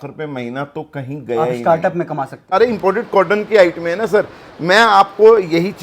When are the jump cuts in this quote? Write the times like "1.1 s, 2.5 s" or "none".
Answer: 2.5 s